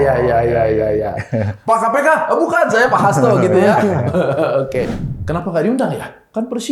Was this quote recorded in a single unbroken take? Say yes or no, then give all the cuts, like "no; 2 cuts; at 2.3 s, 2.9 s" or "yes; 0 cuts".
no; 1 cut; at 4.9 s